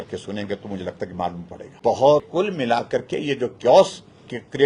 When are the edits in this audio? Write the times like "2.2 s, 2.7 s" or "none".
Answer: 2.3 s